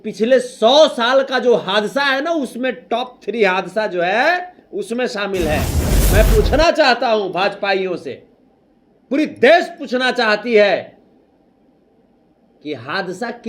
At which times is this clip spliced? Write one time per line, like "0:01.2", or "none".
none